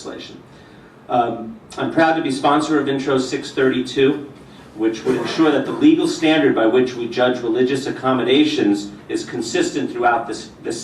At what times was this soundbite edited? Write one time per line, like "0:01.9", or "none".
none